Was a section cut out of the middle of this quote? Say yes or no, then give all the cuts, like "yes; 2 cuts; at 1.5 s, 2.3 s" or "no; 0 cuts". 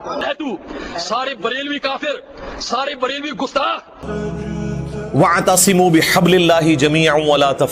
yes; 1 cut; at 4.0 s